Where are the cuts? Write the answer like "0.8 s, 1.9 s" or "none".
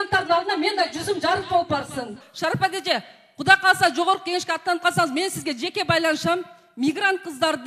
2.2 s